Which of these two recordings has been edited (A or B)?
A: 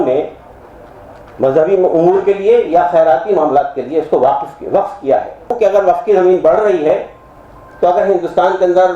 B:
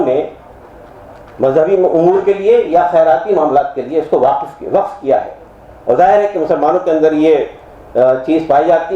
A